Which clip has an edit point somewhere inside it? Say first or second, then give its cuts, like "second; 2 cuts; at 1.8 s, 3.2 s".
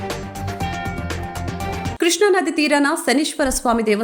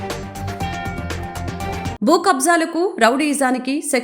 second; 1 cut; at 1.6 s